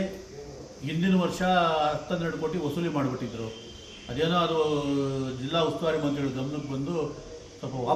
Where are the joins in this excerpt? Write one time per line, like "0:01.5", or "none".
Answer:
none